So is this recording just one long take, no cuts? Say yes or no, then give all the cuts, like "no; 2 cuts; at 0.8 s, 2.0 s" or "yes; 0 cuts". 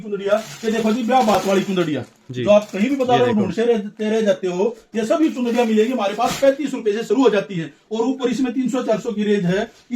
yes; 0 cuts